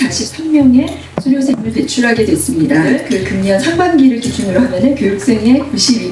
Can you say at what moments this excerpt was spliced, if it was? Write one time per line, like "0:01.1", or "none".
0:03.0

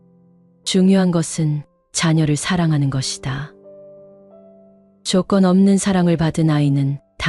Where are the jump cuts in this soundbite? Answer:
0:03.5
0:05.0

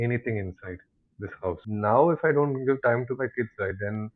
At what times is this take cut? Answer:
0:01.6

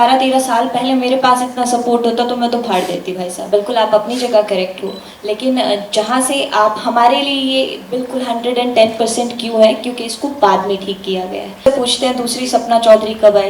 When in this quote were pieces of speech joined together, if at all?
0:03.4
0:11.7

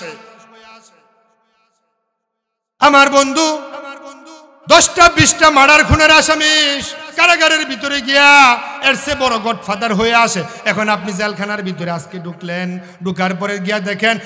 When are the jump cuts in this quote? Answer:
none

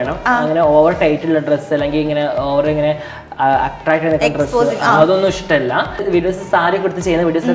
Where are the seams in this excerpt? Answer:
0:06.0

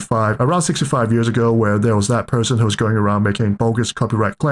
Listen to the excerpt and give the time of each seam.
0:03.6

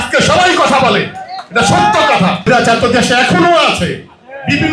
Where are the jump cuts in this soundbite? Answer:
0:02.5

